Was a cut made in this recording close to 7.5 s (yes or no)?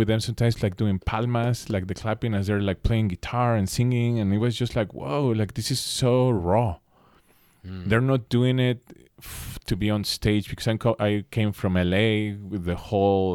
no